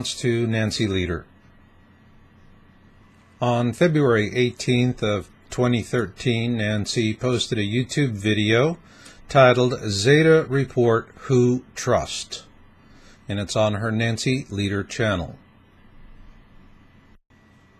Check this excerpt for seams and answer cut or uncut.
cut